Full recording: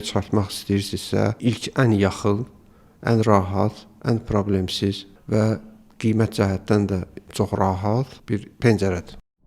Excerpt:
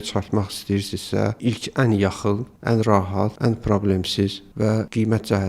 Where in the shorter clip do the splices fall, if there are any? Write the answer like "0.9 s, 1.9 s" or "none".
2.5 s, 3.3 s, 4.6 s